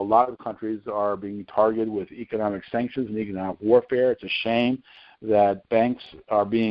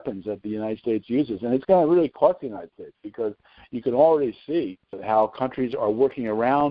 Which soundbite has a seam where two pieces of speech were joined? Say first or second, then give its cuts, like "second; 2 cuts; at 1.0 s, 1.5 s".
second; 1 cut; at 4.9 s